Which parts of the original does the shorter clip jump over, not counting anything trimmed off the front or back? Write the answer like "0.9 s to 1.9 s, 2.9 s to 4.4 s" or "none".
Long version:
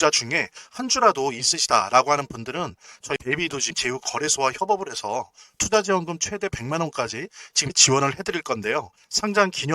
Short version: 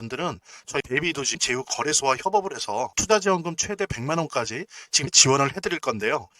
5.3 s to 5.6 s